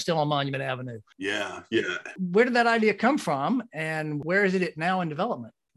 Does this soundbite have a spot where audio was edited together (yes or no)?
yes